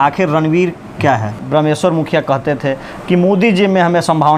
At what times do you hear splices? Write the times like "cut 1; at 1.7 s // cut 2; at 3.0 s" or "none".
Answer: cut 1; at 1.4 s